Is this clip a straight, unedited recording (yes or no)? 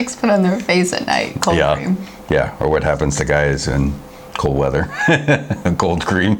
yes